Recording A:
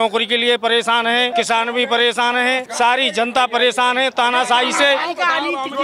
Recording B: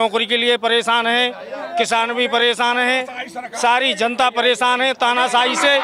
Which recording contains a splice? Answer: A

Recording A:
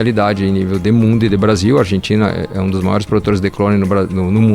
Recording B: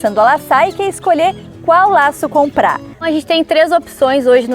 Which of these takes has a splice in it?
B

